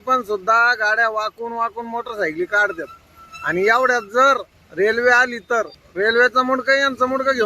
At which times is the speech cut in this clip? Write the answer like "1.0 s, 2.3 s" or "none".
4.6 s, 5.8 s